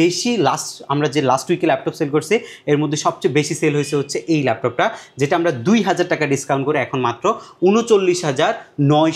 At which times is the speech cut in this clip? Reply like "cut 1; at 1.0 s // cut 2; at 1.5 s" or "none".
none